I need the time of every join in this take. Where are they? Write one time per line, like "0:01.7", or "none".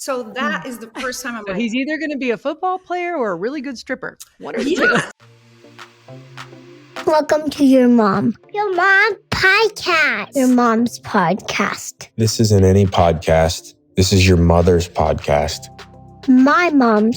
0:05.1